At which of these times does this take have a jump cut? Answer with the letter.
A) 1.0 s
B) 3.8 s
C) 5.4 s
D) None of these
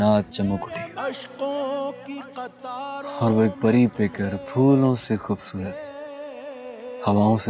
A